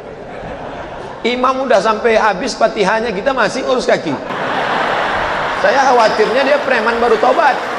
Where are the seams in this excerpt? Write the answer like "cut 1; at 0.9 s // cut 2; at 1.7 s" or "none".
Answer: none